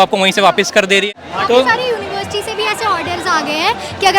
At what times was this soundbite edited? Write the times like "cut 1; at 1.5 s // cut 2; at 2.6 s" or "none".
cut 1; at 1.1 s